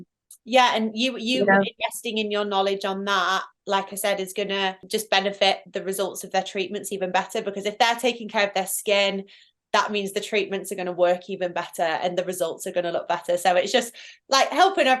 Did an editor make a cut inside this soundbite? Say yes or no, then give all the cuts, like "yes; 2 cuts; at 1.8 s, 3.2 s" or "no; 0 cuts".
yes; 1 cut; at 4.8 s